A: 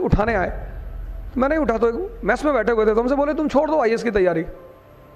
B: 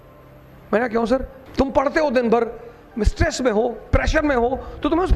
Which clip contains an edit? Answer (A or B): B